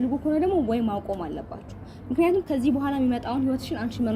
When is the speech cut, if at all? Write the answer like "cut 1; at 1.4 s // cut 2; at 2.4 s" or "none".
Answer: none